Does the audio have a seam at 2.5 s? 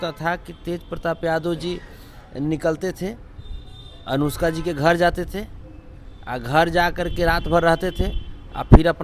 no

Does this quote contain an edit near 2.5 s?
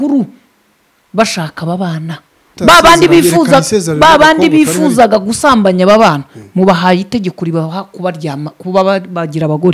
yes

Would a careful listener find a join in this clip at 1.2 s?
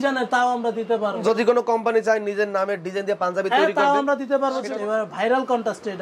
yes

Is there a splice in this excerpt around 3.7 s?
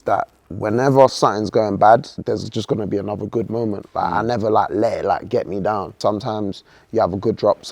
no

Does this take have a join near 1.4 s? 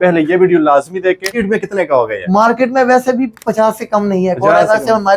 yes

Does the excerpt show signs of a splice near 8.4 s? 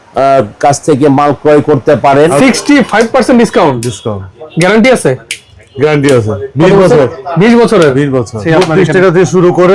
yes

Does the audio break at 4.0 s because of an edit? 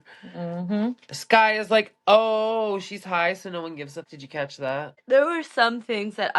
yes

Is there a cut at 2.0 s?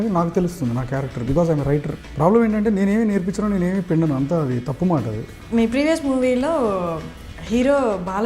yes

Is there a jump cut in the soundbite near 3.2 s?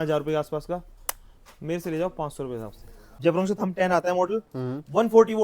yes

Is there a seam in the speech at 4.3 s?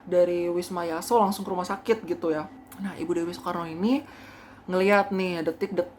no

